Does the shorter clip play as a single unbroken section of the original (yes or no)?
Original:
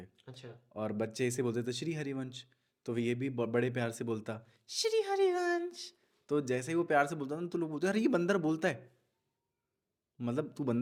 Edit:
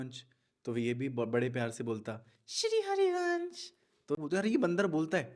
no